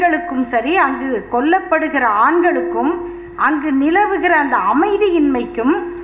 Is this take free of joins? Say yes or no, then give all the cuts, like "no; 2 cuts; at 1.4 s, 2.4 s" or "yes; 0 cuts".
yes; 0 cuts